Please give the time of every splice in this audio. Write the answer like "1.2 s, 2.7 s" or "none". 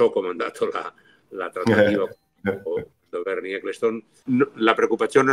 4.2 s

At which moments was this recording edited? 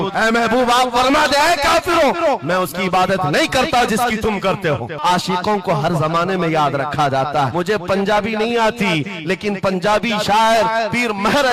5.0 s, 7.5 s

